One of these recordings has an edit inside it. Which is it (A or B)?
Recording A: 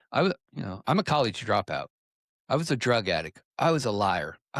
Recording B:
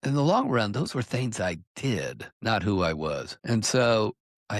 B